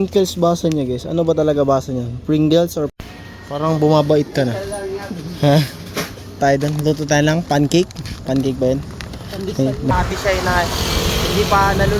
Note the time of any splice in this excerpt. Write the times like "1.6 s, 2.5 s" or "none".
2.9 s, 6.4 s, 9.9 s